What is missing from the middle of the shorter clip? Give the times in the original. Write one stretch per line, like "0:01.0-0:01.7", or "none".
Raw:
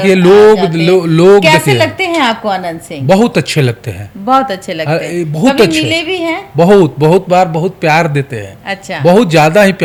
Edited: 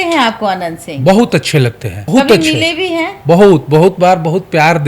0:04.0-0:05.3